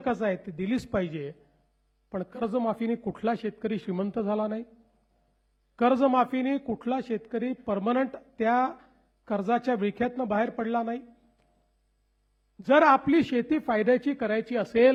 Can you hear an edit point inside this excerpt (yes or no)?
no